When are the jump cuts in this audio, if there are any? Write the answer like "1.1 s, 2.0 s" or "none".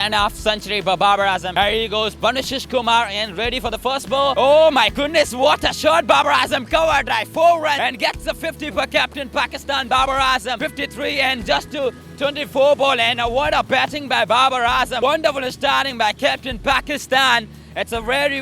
none